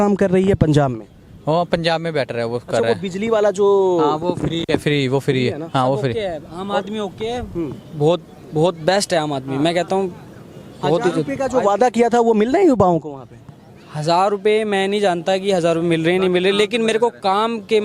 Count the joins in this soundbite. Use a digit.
0